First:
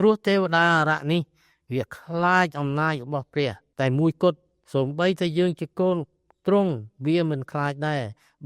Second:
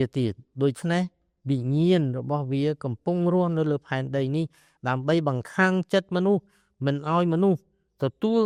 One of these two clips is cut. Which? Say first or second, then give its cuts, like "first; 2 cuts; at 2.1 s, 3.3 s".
first; 1 cut; at 3.6 s